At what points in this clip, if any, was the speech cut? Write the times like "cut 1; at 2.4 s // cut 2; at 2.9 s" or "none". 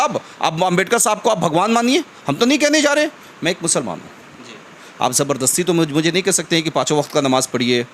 cut 1; at 3.2 s